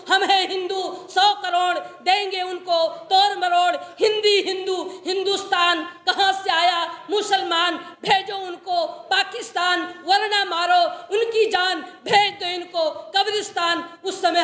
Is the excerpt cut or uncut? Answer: uncut